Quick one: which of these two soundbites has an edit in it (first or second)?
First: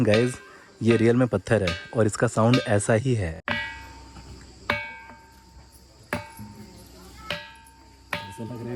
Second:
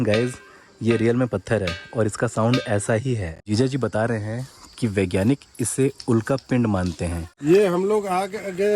second